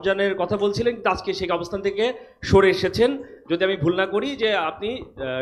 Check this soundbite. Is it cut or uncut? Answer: uncut